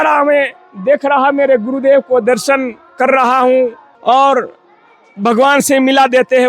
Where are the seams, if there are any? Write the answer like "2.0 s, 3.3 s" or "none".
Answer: 3.9 s